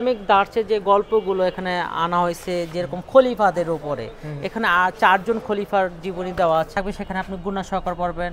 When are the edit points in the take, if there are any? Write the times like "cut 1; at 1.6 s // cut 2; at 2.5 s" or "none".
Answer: cut 1; at 6.7 s